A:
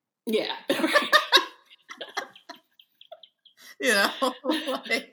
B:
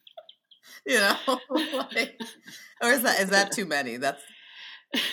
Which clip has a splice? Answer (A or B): A